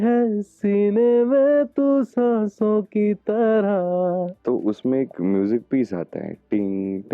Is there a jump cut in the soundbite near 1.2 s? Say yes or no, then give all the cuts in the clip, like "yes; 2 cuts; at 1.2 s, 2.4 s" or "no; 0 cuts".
no; 1 cut; at 4.3 s